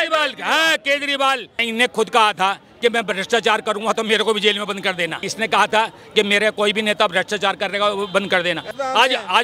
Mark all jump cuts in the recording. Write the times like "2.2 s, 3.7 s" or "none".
1.6 s, 5.2 s, 8.6 s